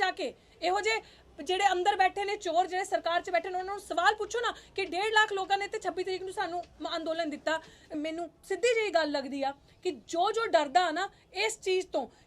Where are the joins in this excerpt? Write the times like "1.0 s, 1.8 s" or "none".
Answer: 7.9 s